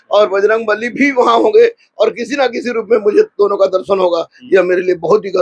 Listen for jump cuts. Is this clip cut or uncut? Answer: uncut